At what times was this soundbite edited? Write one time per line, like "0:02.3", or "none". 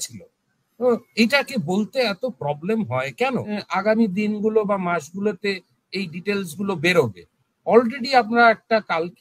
0:03.5